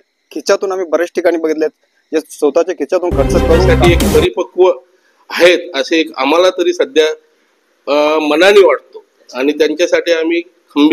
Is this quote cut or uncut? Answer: cut